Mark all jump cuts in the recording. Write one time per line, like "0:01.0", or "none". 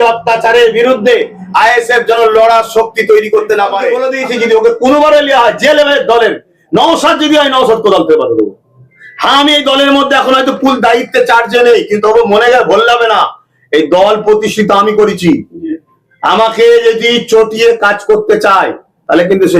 0:04.0